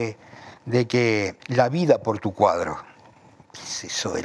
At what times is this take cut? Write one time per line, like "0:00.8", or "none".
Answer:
0:01.4